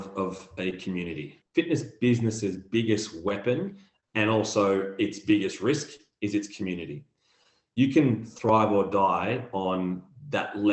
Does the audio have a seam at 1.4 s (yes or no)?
yes